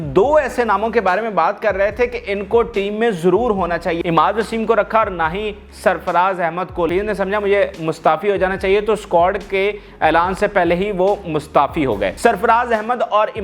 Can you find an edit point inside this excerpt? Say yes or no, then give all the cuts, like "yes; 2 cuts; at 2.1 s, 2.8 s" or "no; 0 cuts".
yes; 3 cuts; at 4.0 s, 6.9 s, 12.1 s